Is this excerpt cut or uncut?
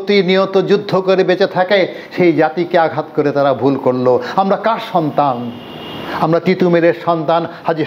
uncut